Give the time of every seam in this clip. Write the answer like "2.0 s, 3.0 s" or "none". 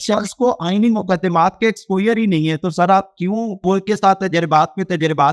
3.6 s